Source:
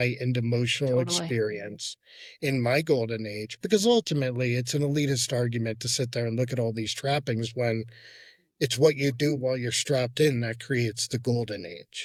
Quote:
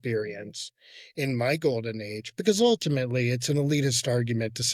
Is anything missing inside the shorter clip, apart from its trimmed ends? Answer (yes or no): no